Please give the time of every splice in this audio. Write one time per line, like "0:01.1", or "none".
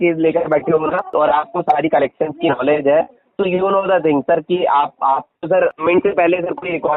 0:01.0
0:05.8

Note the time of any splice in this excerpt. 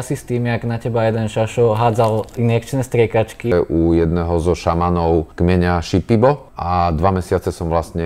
0:03.5
0:05.3
0:06.5

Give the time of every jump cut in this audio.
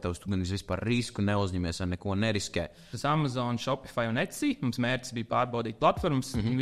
0:02.9

